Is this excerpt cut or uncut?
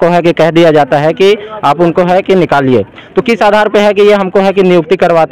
uncut